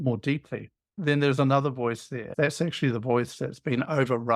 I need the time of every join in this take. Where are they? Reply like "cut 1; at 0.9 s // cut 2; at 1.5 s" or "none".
cut 1; at 2.3 s